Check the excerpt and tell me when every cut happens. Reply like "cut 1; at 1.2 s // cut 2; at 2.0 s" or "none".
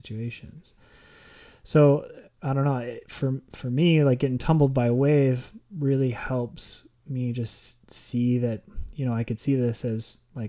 none

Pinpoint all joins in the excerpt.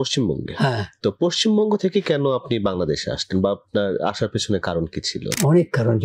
none

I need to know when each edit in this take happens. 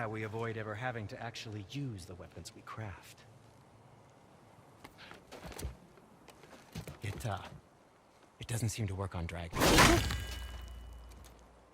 cut 1; at 9.5 s

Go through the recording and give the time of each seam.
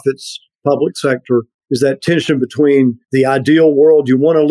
cut 1; at 1.6 s // cut 2; at 3.0 s

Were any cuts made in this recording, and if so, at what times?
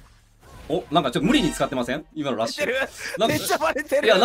cut 1; at 2.1 s

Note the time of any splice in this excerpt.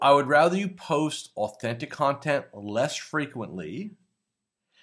none

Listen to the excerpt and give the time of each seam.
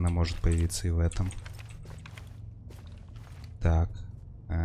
none

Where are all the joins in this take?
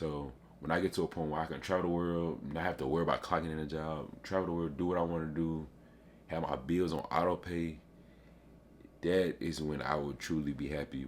none

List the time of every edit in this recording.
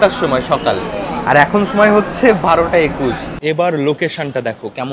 cut 1; at 3.3 s

